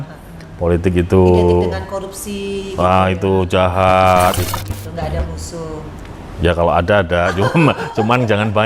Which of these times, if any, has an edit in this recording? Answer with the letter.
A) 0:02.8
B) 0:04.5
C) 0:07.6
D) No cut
B